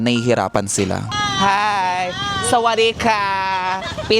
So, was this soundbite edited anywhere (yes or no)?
yes